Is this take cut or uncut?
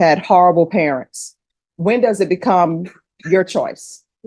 uncut